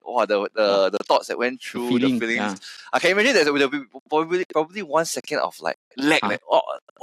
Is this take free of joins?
yes; 0 cuts

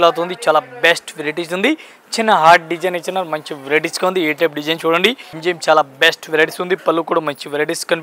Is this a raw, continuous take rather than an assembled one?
no; 1 cut; at 5.4 s

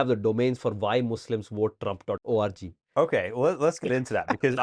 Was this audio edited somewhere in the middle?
yes; 1 cut; at 2.2 s

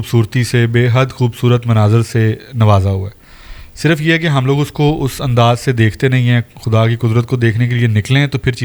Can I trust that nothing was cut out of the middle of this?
yes; 0 cuts

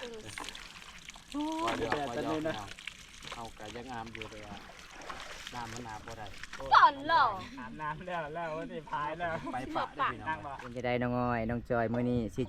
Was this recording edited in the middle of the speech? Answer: yes; 1 cut; at 10.9 s

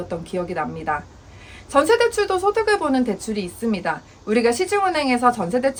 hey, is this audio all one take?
yes; 0 cuts

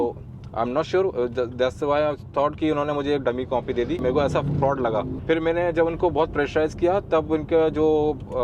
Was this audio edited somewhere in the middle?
yes; 2 cuts; at 4.0 s, 5.2 s

